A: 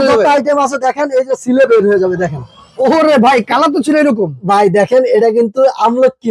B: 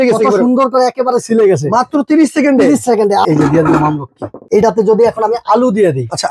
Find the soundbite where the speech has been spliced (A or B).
B